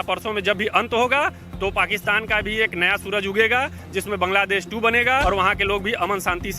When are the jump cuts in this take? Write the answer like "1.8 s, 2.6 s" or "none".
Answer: 5.2 s